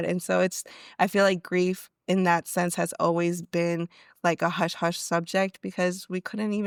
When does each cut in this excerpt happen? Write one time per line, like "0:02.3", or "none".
none